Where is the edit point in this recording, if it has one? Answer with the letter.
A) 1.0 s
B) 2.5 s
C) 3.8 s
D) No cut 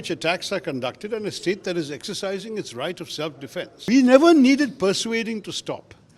C